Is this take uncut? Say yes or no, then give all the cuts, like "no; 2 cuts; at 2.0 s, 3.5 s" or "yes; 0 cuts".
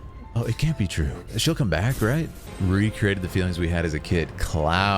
no; 2 cuts; at 1.2 s, 2.4 s